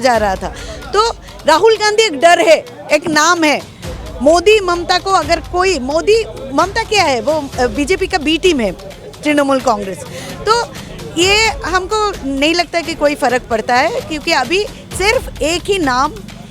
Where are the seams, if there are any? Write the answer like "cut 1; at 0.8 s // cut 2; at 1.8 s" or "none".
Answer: none